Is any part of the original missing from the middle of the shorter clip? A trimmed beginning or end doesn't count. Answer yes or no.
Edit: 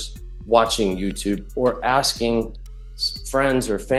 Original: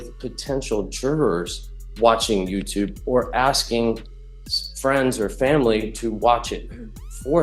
no